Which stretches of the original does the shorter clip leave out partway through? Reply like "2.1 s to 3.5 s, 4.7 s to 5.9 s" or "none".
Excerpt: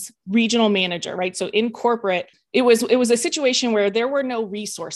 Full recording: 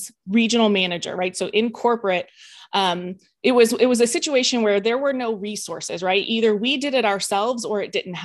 2.4 s to 3.3 s